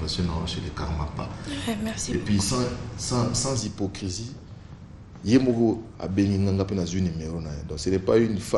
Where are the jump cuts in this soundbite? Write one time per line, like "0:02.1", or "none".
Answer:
none